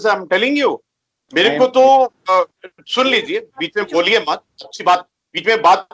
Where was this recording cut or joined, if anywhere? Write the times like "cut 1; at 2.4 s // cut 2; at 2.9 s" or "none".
none